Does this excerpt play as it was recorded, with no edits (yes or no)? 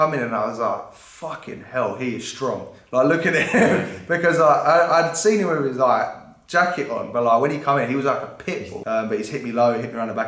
no